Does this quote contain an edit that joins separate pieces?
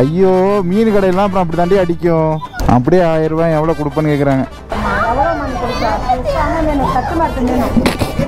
yes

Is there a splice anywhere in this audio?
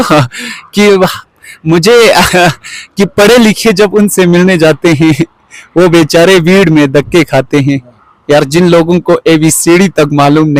no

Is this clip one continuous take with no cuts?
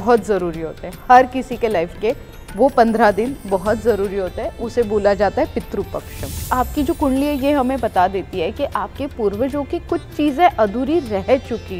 no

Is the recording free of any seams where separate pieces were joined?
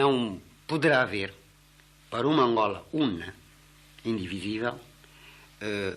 yes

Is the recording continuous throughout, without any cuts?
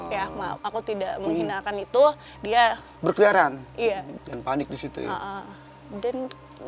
no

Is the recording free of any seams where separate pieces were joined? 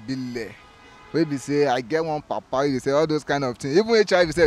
yes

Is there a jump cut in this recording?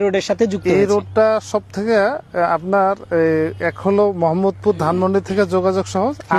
no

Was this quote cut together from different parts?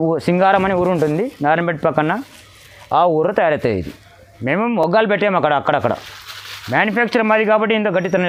no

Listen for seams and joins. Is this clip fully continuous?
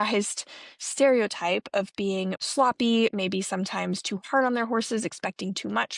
no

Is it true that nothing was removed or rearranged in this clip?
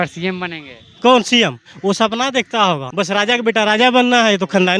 no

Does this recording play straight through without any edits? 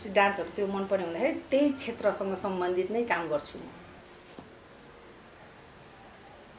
no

